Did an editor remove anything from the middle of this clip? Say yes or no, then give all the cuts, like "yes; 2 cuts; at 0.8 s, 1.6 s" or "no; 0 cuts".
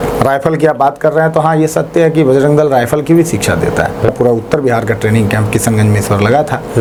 no; 0 cuts